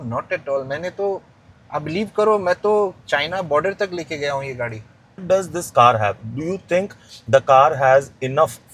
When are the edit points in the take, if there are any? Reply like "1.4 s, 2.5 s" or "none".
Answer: 5.2 s